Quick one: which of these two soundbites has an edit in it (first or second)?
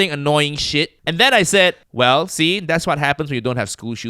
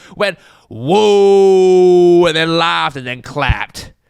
first